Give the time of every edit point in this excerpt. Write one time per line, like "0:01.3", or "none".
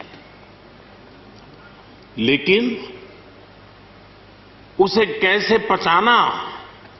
none

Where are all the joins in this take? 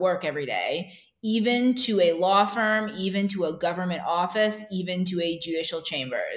none

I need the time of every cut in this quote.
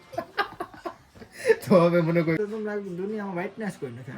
0:02.4

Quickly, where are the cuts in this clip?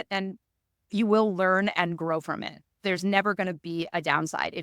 0:00.9
0:02.8

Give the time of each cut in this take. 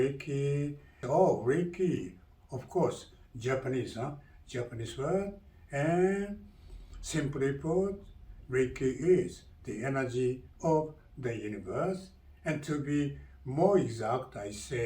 0:01.0

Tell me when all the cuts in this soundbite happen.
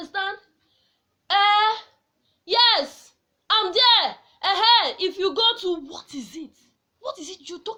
none

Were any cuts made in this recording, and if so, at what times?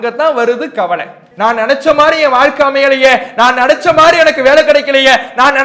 0:01.2

